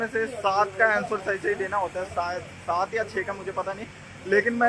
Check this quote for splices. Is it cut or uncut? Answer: uncut